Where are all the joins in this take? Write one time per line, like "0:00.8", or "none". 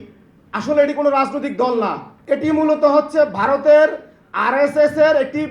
0:02.1